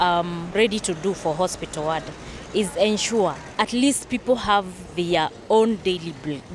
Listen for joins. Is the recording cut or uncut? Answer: cut